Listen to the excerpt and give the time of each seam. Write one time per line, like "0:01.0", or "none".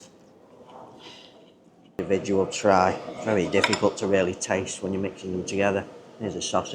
0:02.0